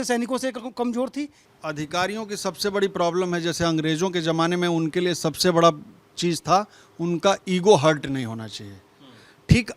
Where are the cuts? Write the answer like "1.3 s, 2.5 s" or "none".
1.4 s